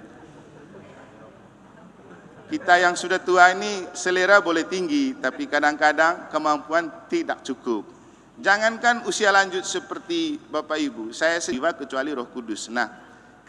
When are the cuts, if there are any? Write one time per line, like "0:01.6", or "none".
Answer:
0:11.6